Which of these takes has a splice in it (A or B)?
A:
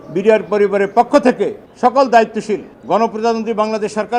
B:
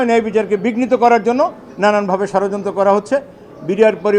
A